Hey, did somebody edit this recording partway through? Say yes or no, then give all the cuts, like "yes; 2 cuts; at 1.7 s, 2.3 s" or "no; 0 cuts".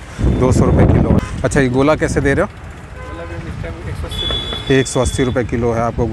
yes; 1 cut; at 1.1 s